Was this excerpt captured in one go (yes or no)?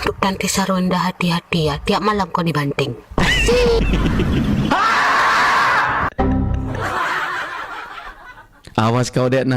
yes